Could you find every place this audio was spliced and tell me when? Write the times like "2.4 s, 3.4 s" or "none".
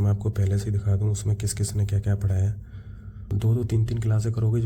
3.3 s